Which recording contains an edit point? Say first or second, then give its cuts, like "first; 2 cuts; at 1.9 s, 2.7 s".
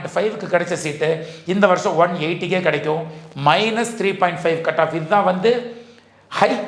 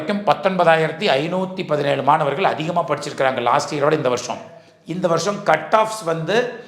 second; 1 cut; at 4.6 s